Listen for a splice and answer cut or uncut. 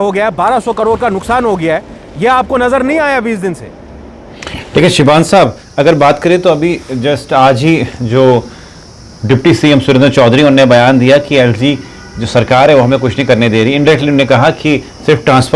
uncut